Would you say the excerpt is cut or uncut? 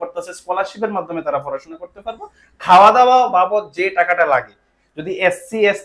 uncut